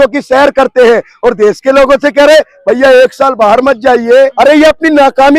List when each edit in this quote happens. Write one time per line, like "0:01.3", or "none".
0:04.3